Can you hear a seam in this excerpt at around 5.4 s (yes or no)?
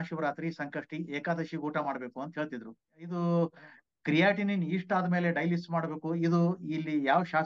no